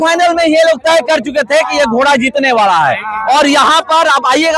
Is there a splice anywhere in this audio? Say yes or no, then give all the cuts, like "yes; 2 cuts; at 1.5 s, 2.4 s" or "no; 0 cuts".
no; 0 cuts